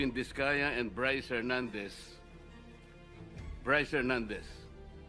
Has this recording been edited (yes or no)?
yes